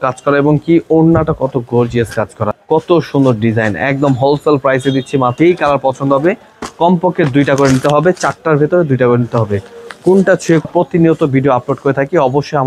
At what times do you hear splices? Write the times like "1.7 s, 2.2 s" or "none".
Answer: 2.5 s, 5.3 s, 10.6 s